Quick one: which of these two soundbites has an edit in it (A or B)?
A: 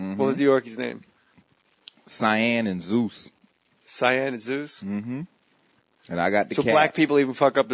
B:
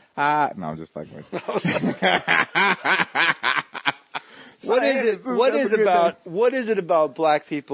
A